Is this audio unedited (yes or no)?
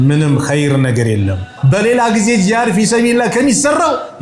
no